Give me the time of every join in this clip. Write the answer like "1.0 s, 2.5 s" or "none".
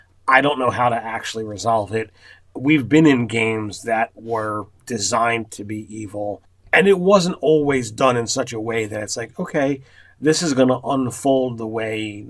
none